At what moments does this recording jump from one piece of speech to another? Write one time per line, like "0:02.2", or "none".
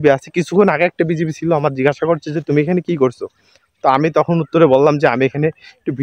none